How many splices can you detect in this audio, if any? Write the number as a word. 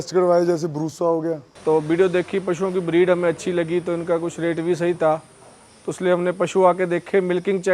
one